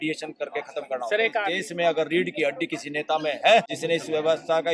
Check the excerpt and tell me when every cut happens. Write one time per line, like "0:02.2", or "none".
0:01.5
0:03.7